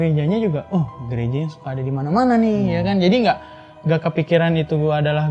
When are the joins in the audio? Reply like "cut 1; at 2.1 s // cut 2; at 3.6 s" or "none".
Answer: none